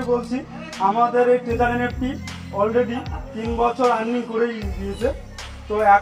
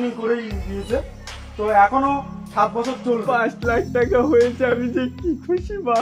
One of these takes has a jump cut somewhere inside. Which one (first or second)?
second